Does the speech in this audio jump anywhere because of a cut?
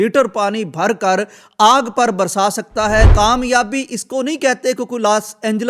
yes; 1 cut; at 3.1 s

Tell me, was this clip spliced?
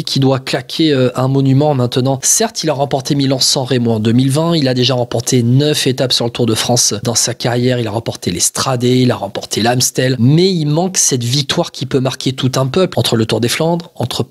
yes; 3 cuts; at 2.3 s, 10.2 s, 12.9 s

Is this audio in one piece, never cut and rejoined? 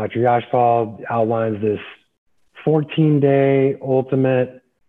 yes; 0 cuts

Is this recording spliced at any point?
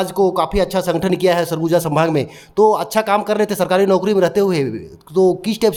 no; 0 cuts

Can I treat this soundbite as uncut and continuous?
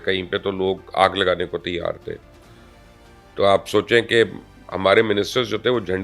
yes; 0 cuts

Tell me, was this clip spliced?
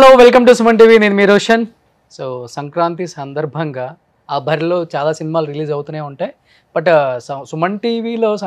no; 0 cuts

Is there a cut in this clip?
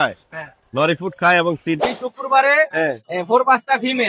yes; 1 cut; at 1.8 s

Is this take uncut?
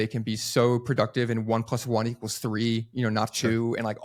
yes; 0 cuts

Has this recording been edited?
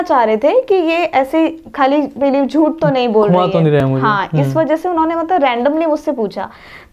no; 0 cuts

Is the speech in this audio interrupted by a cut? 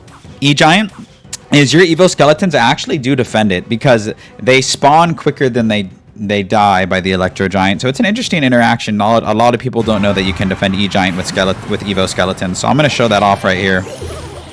no; 0 cuts

